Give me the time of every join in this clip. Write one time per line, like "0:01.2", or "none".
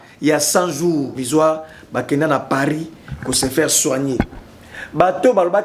0:01.2

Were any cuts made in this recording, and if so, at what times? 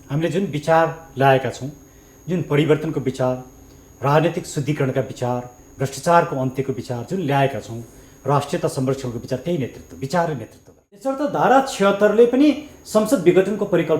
0:11.1

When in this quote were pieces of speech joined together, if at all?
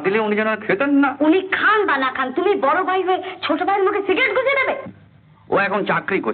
none

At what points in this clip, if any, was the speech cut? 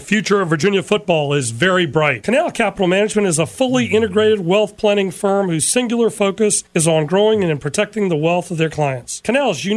0:02.2

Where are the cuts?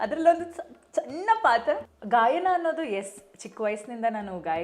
0:01.9

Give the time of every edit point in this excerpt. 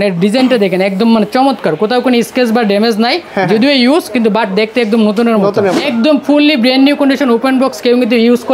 0:05.8

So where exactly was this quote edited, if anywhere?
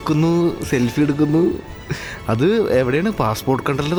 none

